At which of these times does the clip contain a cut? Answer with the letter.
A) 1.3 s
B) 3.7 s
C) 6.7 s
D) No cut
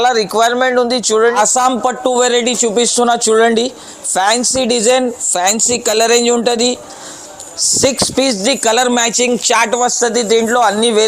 A